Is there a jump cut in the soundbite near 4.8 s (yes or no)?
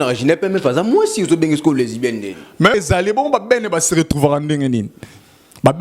no